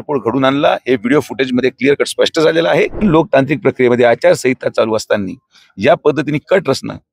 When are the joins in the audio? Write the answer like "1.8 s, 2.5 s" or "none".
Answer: 3.0 s